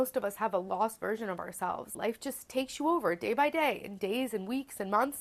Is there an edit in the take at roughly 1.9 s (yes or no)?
yes